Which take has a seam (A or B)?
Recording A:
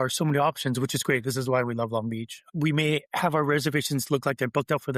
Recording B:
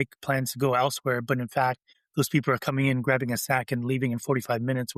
A